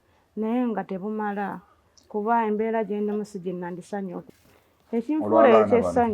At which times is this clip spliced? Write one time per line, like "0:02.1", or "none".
0:04.2